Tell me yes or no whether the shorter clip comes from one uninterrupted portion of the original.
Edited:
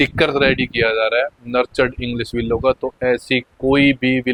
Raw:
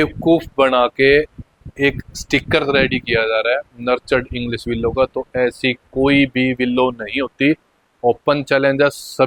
yes